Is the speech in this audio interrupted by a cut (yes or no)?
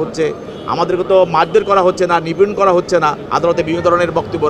yes